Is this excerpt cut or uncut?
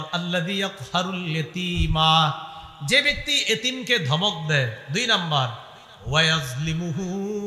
uncut